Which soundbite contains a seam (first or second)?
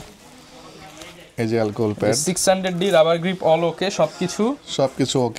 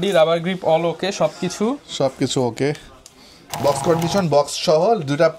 second